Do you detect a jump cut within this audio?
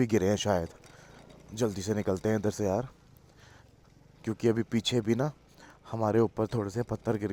no; 0 cuts

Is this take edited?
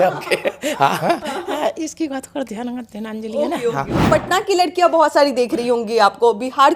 yes; 1 cut; at 4.0 s

